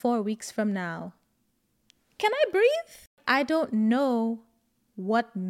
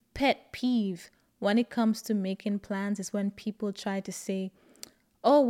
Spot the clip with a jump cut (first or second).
first